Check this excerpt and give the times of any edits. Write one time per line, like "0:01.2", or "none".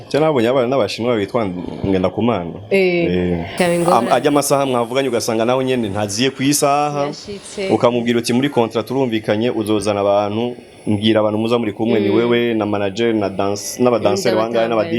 0:03.5